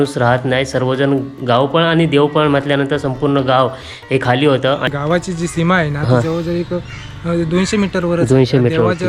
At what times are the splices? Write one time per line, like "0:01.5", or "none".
0:04.8